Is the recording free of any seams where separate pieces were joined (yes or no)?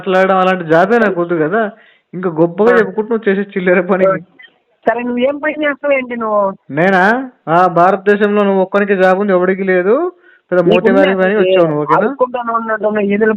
no